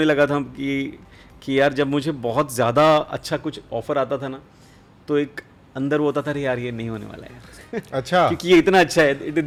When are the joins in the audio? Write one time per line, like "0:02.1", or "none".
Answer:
none